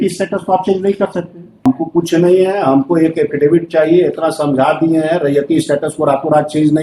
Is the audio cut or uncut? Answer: cut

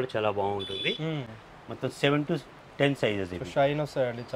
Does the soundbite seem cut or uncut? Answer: uncut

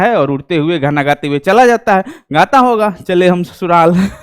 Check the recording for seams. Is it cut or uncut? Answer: uncut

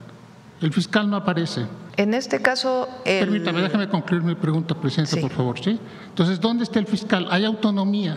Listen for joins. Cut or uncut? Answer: cut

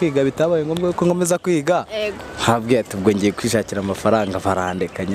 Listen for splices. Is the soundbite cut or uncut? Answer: uncut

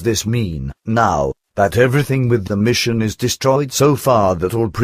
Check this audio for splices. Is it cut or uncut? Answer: uncut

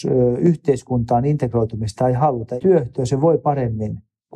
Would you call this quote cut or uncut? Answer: cut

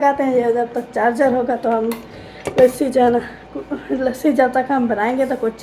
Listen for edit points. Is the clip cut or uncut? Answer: uncut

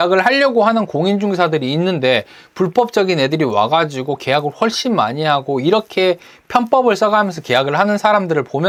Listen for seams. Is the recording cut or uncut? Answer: uncut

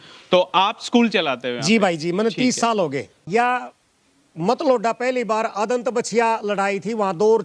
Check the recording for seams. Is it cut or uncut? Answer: cut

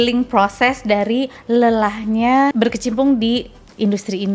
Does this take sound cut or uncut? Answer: cut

